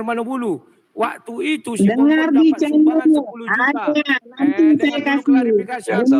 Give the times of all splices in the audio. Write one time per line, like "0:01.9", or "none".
none